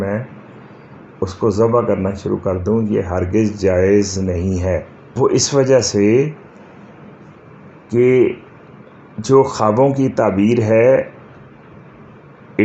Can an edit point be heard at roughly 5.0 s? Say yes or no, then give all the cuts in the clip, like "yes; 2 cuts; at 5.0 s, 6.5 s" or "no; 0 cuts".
yes; 1 cut; at 5.0 s